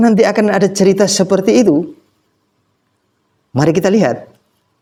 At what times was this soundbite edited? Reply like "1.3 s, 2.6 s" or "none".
none